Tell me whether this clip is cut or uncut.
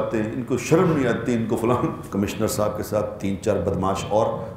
cut